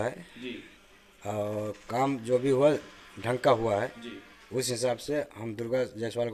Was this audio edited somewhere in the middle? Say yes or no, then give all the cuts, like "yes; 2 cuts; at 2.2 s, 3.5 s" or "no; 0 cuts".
no; 0 cuts